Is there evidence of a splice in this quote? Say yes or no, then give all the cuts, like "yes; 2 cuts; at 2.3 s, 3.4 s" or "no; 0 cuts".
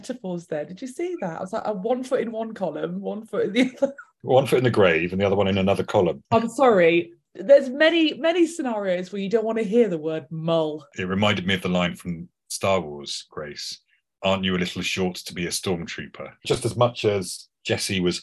yes; 3 cuts; at 6.2 s, 10.9 s, 16.3 s